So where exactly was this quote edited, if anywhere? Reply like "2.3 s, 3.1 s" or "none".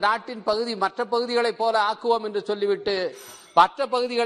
none